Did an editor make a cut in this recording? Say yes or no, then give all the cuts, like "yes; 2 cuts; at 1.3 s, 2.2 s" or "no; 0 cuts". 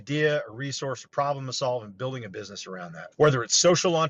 yes; 1 cut; at 3.0 s